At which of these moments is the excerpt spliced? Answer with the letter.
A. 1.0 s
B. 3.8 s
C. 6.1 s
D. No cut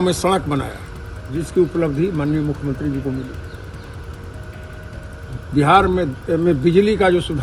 D